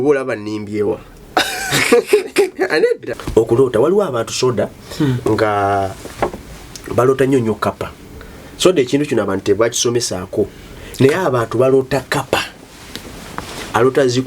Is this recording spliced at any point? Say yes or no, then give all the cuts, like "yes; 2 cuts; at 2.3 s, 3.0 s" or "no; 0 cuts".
yes; 1 cut; at 3.1 s